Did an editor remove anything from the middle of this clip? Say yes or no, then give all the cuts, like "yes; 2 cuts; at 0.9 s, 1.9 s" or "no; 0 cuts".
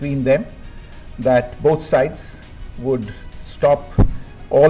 no; 0 cuts